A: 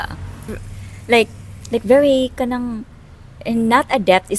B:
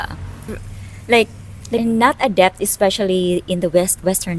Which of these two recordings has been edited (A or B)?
B